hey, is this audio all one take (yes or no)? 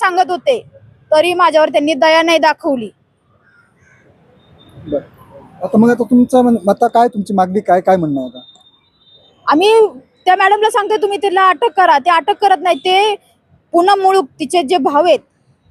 yes